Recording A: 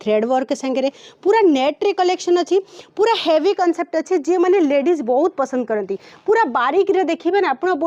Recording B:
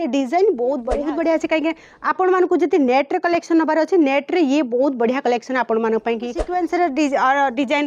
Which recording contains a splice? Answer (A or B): B